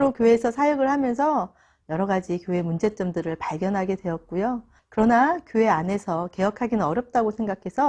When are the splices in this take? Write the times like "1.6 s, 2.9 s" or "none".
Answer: 4.8 s